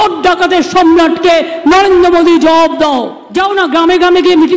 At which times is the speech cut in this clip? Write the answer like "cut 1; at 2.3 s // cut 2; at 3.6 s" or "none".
cut 1; at 3.2 s